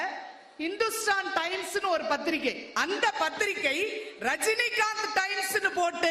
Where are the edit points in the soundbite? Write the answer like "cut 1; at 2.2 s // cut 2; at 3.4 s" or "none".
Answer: cut 1; at 2.7 s

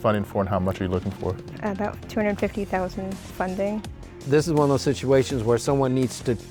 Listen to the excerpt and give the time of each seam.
cut 1; at 1.5 s // cut 2; at 4.2 s

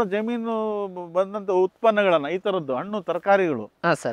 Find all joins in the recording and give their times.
none

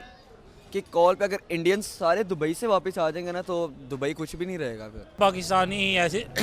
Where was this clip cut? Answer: cut 1; at 5.2 s

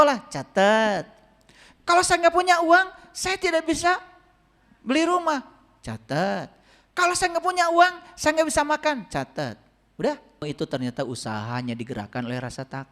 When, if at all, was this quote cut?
cut 1; at 10.4 s

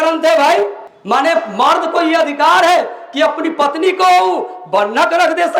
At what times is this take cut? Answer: none

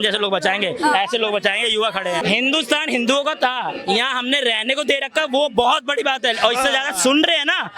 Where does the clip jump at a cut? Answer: cut 1; at 2.2 s

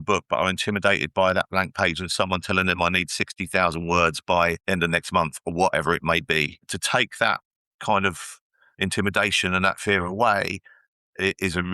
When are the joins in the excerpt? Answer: cut 1; at 4.6 s // cut 2; at 6.7 s

